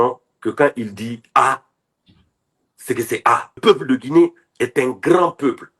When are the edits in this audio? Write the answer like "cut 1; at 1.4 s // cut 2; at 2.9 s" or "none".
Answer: cut 1; at 3.6 s